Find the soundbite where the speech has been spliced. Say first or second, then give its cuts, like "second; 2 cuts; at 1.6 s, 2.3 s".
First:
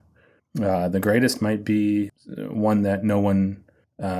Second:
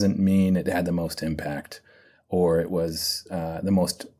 first; 1 cut; at 2.2 s